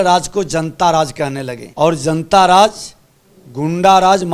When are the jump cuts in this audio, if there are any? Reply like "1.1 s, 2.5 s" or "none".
1.6 s